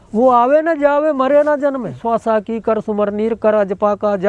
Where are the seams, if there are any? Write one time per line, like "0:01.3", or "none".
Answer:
0:02.0